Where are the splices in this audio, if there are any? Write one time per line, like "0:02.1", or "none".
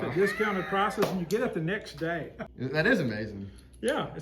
0:02.4